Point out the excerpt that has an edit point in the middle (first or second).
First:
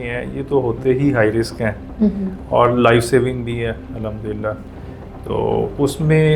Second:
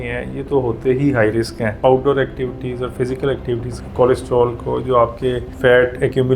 second